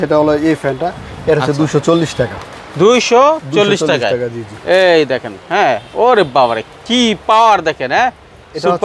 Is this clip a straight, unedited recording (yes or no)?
yes